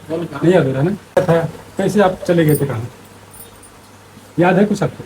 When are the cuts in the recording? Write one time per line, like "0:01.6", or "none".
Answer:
0:01.1